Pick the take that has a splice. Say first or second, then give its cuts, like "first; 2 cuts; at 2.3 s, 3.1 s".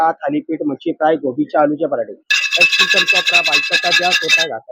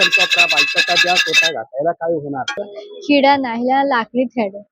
second; 1 cut; at 2.8 s